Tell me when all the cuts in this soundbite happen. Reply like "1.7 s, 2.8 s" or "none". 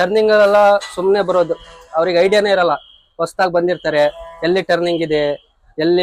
none